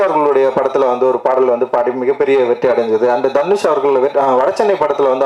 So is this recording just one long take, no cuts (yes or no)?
yes